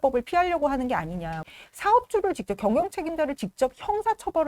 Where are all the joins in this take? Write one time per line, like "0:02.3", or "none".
0:01.4